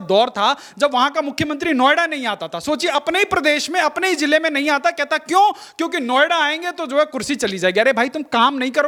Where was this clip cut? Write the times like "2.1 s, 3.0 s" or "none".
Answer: none